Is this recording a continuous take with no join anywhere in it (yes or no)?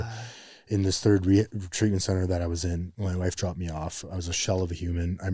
no